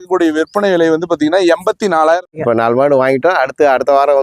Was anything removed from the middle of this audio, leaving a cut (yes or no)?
yes